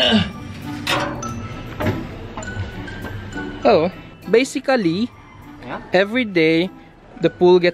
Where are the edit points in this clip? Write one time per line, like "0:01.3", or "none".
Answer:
none